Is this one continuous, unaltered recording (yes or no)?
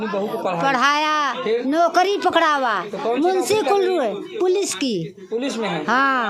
yes